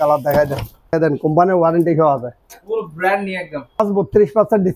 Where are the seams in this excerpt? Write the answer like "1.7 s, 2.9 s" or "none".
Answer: 0.9 s, 3.8 s